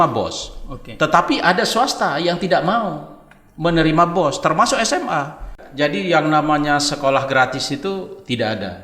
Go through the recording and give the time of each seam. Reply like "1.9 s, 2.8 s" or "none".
5.6 s